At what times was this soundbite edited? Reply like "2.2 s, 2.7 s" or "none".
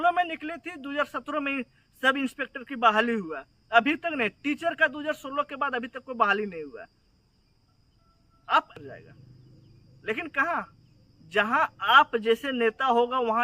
8.7 s